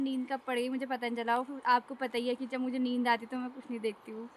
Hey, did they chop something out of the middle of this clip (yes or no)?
no